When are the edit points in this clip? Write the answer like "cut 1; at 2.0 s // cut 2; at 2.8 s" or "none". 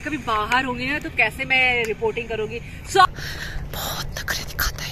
cut 1; at 3.1 s